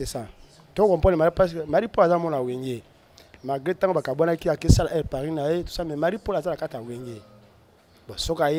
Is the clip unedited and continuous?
yes; 0 cuts

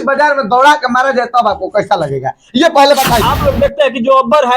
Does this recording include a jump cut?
yes; 1 cut; at 3.2 s

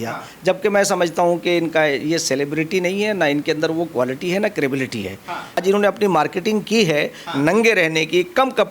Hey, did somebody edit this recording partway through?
yes; 1 cut; at 5.6 s

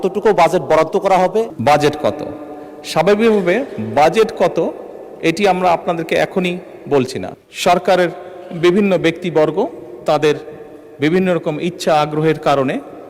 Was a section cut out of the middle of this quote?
yes; 2 cuts; at 1.5 s, 7.4 s

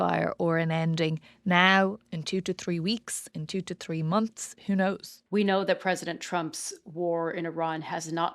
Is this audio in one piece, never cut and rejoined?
no; 1 cut; at 5.1 s

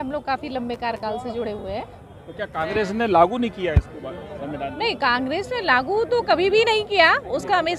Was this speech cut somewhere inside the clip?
no; 0 cuts

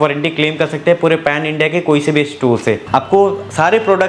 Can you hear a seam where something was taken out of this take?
yes; 1 cut; at 2.8 s

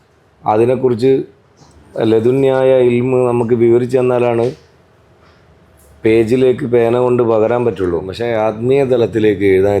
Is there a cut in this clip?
yes; 1 cut; at 8.1 s

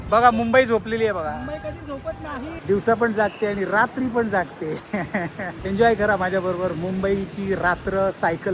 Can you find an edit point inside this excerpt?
yes; 2 cuts; at 2.6 s, 5.6 s

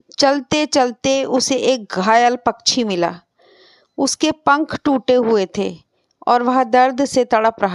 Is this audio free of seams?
yes; 0 cuts

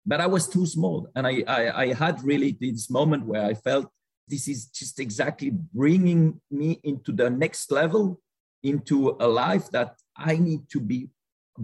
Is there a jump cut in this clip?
no; 0 cuts

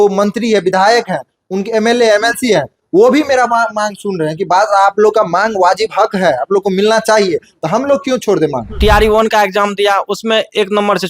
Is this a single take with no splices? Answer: no; 1 cut; at 8.7 s

